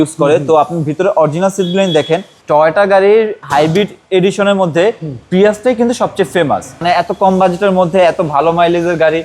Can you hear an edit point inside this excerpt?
yes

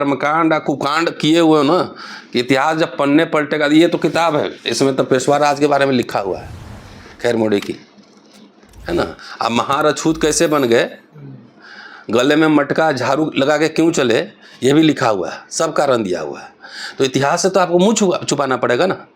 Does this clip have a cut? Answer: no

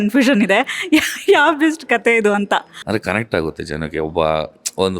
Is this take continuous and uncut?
no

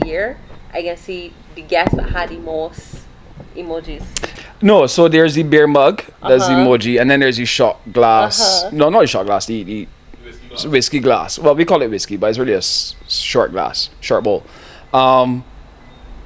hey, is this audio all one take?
no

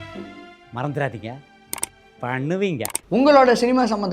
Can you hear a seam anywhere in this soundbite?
yes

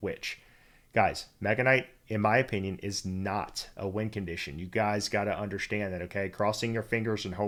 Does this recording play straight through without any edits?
yes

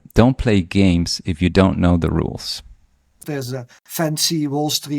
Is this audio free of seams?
no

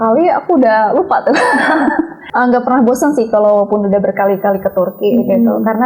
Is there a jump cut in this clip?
yes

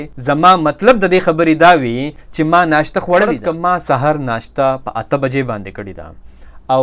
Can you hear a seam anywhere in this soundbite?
yes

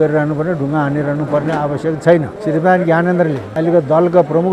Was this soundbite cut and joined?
yes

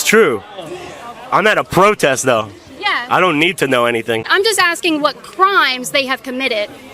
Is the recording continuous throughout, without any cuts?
no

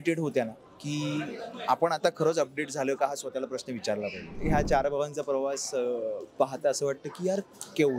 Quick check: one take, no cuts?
no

